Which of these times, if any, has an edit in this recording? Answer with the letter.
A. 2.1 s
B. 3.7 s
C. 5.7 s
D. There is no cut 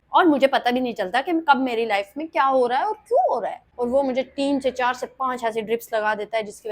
B